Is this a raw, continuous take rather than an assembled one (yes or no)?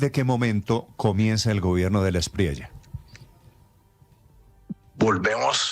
yes